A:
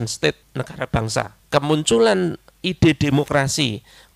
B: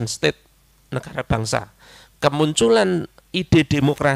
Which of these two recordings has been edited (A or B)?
A